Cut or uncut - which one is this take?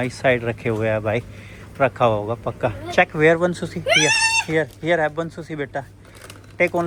uncut